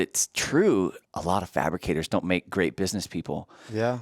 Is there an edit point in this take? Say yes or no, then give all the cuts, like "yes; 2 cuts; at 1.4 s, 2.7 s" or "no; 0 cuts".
yes; 1 cut; at 1.0 s